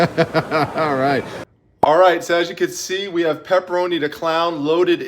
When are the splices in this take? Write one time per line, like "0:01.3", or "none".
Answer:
0:01.4